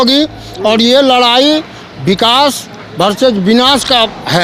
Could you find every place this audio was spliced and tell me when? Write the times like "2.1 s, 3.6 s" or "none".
none

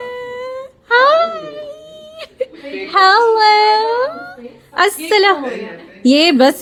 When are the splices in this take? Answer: none

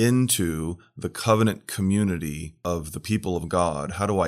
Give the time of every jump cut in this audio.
2.5 s

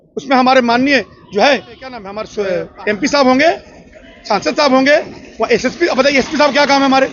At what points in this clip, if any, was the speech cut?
2.2 s

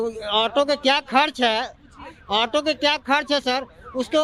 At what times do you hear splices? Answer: none

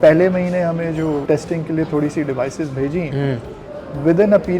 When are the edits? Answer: 1.2 s

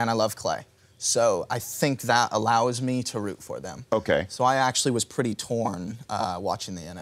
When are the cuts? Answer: 4.8 s

